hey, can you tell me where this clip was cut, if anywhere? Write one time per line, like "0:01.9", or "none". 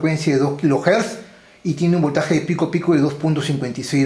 none